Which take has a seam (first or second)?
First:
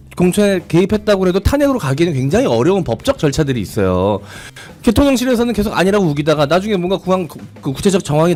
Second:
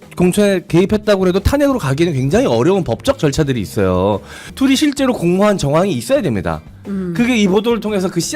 second